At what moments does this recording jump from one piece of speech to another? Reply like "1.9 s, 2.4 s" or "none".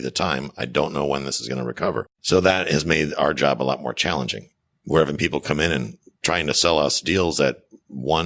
2.1 s